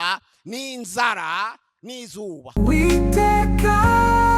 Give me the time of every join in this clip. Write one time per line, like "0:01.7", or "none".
0:02.4